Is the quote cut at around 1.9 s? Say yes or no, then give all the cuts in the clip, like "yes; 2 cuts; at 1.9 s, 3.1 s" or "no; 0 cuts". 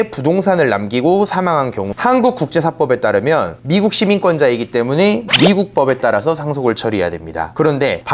yes; 1 cut; at 1.9 s